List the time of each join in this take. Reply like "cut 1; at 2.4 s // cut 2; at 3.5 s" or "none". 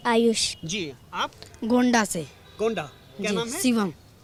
none